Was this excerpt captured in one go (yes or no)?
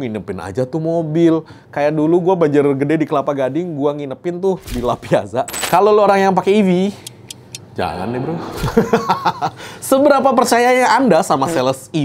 no